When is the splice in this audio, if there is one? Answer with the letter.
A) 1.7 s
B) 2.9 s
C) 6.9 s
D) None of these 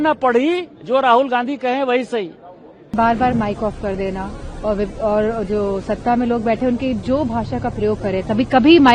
B